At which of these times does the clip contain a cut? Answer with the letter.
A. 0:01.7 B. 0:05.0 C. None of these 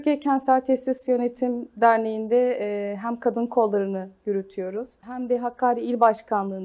B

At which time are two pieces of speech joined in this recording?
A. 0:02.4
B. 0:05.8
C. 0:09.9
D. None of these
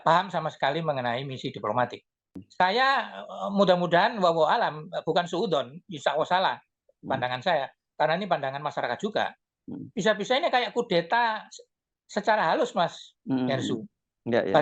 A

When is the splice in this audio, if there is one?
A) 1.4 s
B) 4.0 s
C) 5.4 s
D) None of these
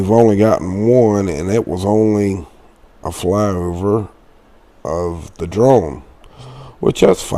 A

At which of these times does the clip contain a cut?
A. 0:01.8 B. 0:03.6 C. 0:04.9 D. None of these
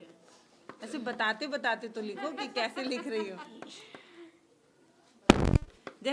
D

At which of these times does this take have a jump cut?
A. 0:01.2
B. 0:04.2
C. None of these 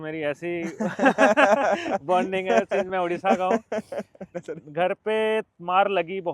B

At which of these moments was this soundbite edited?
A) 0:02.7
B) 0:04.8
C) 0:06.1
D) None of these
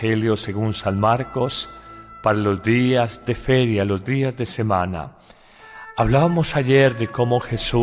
C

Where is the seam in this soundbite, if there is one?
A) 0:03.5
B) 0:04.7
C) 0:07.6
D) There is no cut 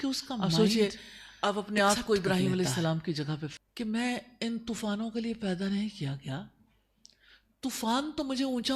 A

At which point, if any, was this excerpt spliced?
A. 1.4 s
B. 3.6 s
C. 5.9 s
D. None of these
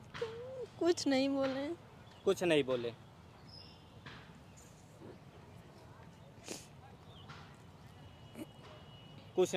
D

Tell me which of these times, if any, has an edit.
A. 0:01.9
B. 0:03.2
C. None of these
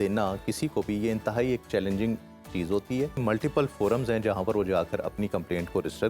B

